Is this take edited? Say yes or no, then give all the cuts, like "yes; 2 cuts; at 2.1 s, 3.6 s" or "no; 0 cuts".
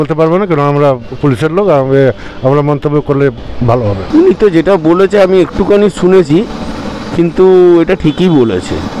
no; 0 cuts